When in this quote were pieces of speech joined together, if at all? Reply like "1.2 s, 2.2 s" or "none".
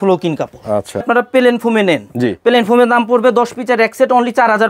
1.1 s